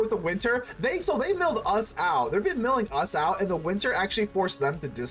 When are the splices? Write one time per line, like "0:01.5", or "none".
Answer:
none